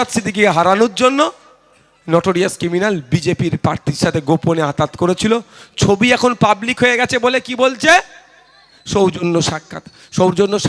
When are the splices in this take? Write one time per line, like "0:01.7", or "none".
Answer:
none